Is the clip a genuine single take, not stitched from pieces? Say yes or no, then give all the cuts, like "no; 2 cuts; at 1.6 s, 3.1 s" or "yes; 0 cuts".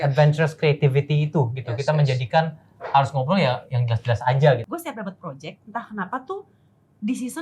no; 1 cut; at 4.6 s